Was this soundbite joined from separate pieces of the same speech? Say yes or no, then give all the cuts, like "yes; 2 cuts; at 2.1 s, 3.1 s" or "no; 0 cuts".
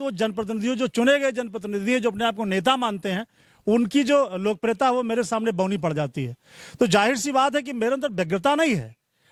no; 0 cuts